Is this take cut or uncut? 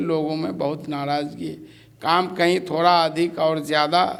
uncut